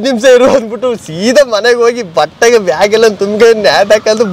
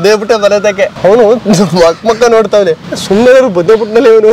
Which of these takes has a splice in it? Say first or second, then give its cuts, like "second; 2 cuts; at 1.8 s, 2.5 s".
second; 2 cuts; at 0.9 s, 2.9 s